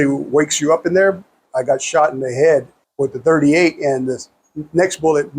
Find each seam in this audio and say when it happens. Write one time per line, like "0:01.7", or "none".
0:01.4
0:02.8